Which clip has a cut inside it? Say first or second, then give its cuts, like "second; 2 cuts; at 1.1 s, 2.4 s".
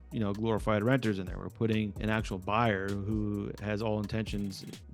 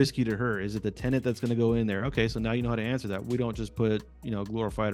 first; 1 cut; at 2.0 s